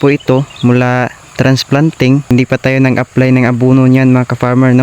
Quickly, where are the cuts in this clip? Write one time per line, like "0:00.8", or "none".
0:02.3